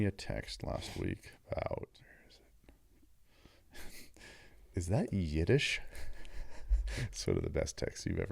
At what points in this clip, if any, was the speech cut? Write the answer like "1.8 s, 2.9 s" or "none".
1.9 s